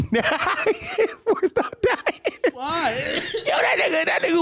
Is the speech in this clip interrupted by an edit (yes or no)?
yes